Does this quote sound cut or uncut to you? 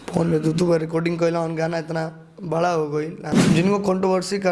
cut